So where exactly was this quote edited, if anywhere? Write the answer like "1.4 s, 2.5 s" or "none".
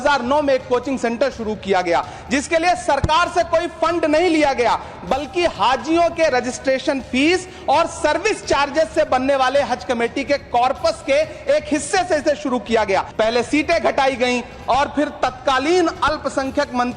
13.1 s